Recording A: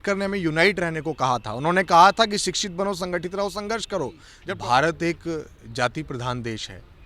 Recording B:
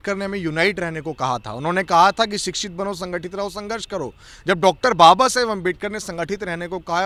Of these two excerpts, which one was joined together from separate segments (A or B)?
A